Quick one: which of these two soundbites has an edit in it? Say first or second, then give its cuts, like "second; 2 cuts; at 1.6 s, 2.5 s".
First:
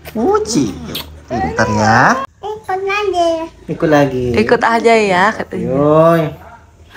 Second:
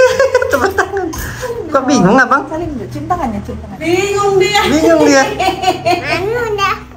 first; 1 cut; at 2.3 s